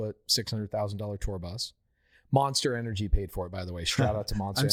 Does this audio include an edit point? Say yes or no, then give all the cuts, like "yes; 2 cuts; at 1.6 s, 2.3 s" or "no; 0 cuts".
no; 0 cuts